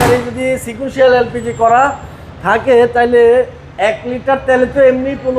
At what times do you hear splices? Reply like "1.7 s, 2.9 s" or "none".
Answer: none